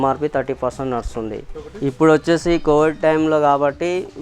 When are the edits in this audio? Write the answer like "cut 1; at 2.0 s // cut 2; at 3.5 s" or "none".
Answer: cut 1; at 1.7 s